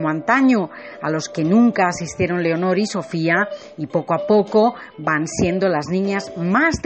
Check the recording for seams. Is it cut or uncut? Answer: uncut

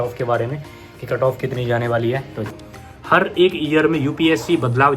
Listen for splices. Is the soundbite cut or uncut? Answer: cut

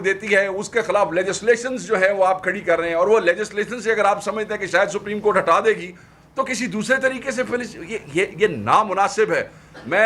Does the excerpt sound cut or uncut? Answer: uncut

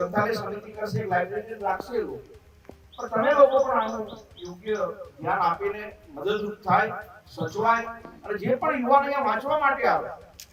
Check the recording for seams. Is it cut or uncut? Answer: uncut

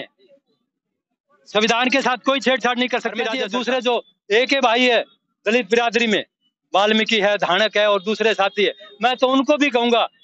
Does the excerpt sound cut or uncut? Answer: cut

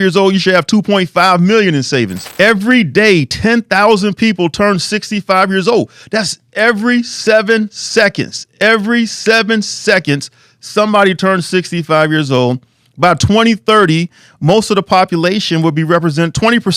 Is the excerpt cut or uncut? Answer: cut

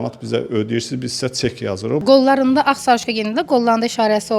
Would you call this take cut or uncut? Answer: cut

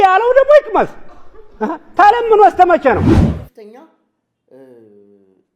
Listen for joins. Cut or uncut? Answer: cut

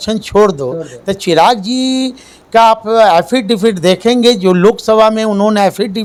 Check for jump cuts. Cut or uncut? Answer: uncut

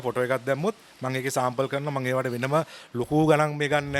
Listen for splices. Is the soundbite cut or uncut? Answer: uncut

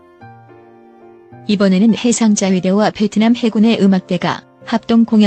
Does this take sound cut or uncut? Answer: cut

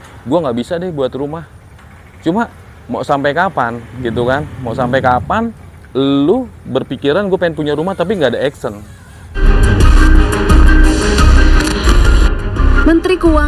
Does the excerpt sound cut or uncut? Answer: cut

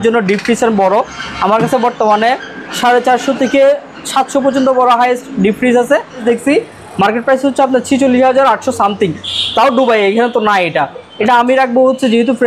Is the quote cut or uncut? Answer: cut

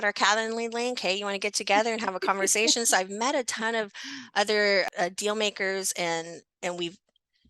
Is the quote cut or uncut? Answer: cut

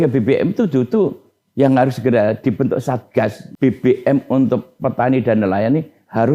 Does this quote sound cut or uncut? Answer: cut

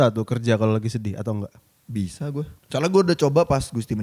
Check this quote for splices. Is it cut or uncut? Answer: cut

